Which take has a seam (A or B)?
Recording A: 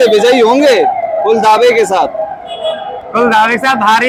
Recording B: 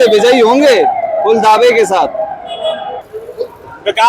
B